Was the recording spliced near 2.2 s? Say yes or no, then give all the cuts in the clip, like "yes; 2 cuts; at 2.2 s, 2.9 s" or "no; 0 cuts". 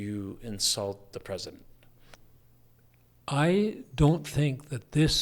yes; 1 cut; at 2.2 s